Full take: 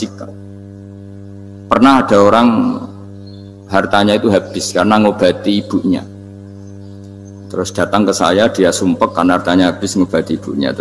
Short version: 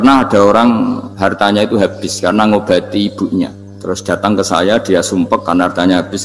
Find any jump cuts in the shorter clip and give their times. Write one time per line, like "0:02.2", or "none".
0:01.1
0:03.7